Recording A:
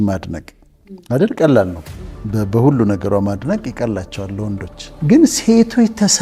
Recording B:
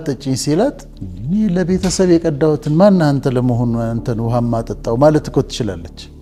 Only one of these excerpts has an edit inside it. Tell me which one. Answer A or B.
A